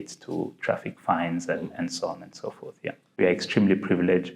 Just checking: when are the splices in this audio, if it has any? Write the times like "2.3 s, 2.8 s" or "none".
3.2 s